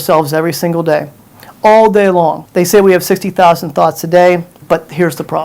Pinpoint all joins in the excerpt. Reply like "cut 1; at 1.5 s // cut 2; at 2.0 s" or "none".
cut 1; at 2.4 s // cut 2; at 4.6 s